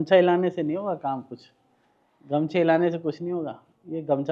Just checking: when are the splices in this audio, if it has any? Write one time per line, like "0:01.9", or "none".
none